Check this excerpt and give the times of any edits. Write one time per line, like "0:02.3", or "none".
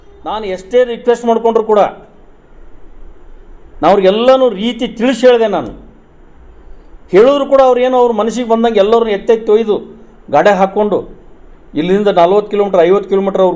none